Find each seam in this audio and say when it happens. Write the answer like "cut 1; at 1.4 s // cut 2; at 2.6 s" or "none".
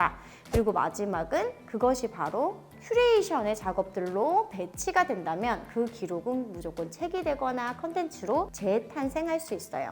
cut 1; at 8.5 s